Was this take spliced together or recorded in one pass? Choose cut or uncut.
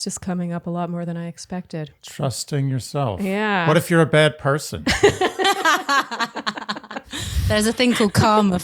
cut